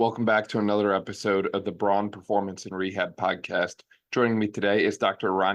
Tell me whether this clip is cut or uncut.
uncut